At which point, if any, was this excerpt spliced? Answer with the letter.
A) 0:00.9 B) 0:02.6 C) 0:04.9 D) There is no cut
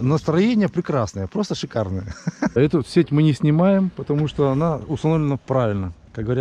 B